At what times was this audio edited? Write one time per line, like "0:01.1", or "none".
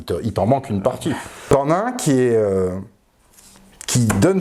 0:01.3

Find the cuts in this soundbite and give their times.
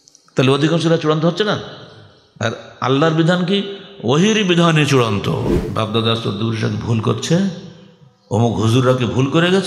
0:05.6

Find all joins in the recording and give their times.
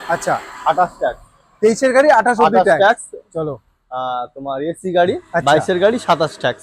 0:05.4

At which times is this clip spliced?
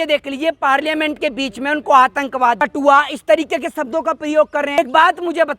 0:02.6
0:04.8

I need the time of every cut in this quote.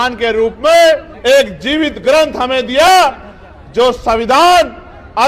0:01.1

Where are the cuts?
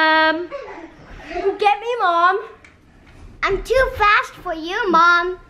0:01.4

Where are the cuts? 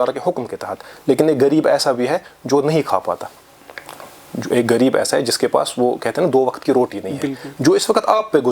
none

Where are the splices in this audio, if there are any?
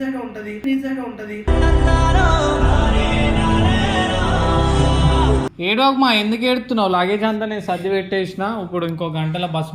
0:05.5

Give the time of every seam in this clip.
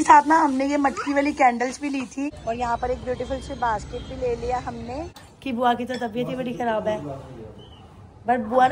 0:02.4
0:05.3

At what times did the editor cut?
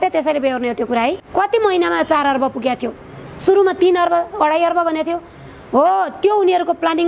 0:01.2

